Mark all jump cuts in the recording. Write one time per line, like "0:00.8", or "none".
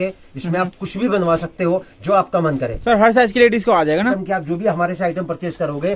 0:02.8
0:04.2